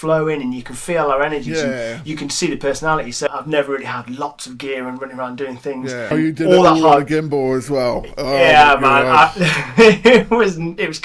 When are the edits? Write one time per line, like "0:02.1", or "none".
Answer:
0:03.3
0:06.1